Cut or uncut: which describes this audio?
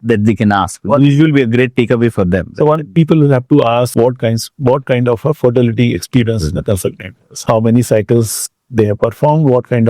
cut